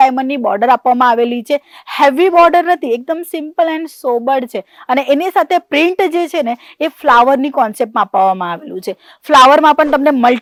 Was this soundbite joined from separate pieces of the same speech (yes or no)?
no